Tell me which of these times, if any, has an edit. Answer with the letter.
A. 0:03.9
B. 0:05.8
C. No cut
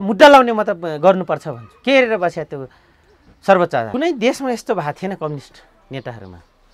A